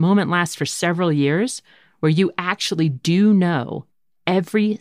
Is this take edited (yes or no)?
no